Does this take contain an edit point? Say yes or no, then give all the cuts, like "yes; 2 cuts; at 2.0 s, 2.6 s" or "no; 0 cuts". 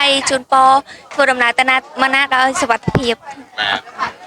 no; 0 cuts